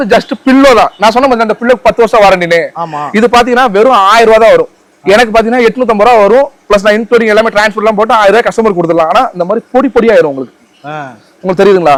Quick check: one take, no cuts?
yes; 0 cuts

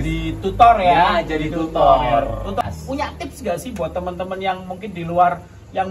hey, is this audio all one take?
no; 1 cut; at 2.7 s

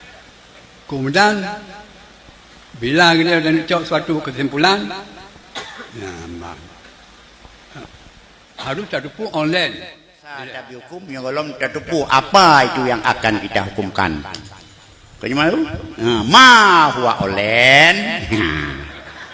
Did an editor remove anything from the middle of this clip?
yes; 1 cut; at 10.4 s

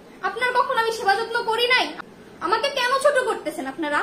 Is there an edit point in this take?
yes; 1 cut; at 2.0 s

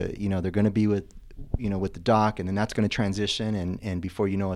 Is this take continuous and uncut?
yes; 0 cuts

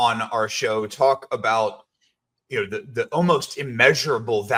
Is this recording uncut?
yes; 0 cuts

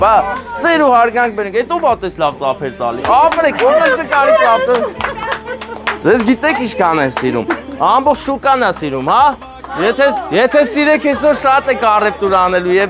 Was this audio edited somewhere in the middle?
no; 0 cuts

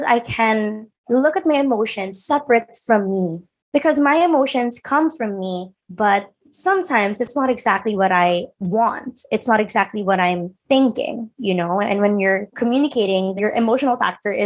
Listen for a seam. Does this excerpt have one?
yes; 2 cuts; at 12.5 s, 13.4 s

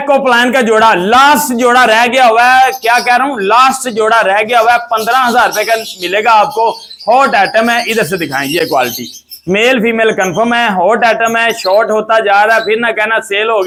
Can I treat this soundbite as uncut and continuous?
yes; 0 cuts

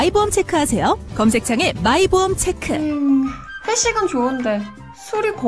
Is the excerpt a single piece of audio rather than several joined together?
no; 1 cut; at 2.8 s

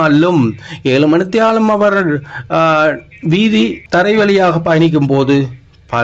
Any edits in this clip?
yes; 1 cut; at 3.8 s

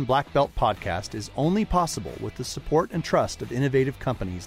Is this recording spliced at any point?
no; 0 cuts

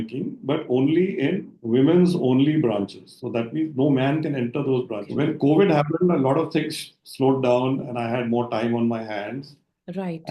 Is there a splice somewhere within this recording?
yes; 1 cut; at 5.1 s

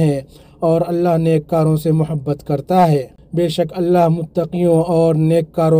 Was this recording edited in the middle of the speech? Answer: yes; 1 cut; at 3.2 s

